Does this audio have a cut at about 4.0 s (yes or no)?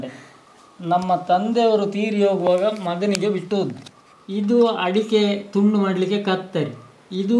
no